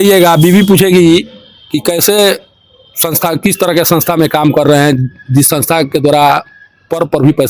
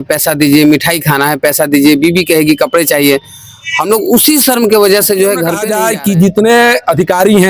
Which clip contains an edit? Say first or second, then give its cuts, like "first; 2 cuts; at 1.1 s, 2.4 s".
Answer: second; 1 cut; at 5.6 s